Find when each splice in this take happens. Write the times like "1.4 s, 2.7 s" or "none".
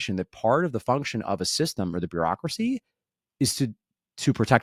none